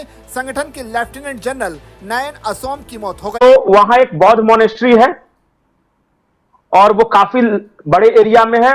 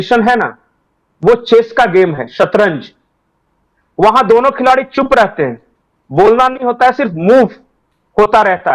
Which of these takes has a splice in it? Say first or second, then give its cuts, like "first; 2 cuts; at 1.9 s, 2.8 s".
first; 1 cut; at 3.4 s